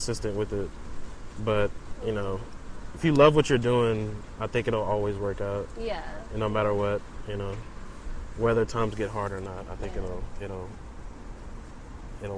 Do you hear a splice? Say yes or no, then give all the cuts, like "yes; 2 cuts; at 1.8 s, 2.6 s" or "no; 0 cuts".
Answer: no; 0 cuts